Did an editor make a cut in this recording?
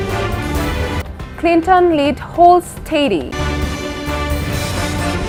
no; 0 cuts

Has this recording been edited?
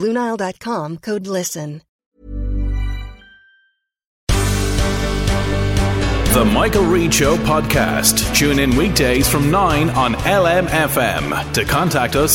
yes; 2 cuts; at 1.9 s, 4.1 s

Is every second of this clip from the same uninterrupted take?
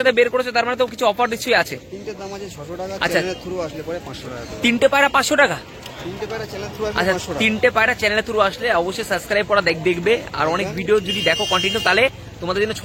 yes; 0 cuts

